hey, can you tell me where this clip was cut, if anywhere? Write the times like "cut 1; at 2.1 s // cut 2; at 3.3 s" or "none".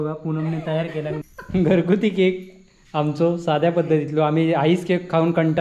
cut 1; at 1.2 s